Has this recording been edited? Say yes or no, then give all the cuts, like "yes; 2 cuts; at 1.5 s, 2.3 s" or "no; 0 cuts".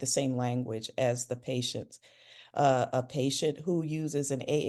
no; 0 cuts